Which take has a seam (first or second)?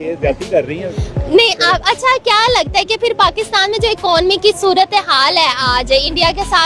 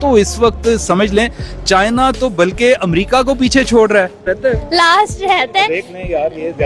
second